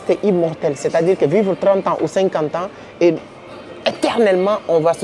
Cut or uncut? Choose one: uncut